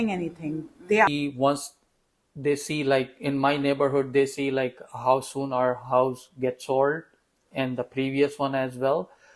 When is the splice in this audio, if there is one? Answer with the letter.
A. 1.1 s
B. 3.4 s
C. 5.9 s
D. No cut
A